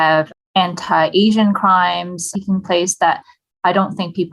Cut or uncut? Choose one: uncut